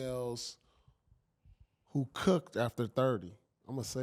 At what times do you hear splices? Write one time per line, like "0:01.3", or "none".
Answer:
none